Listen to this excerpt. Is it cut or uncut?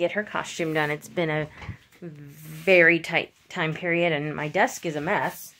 uncut